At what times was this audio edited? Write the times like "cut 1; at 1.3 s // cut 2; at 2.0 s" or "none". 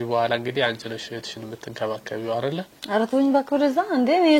cut 1; at 2.8 s